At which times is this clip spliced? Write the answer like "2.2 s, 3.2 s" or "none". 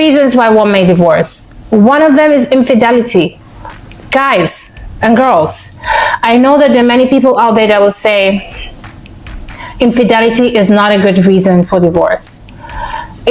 none